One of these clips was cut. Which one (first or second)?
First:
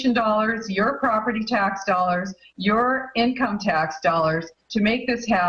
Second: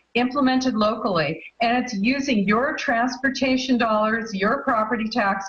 first